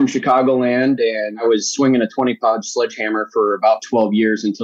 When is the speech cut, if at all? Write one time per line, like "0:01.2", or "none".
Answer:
0:01.4